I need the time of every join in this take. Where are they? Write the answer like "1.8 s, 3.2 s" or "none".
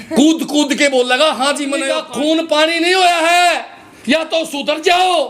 1.8 s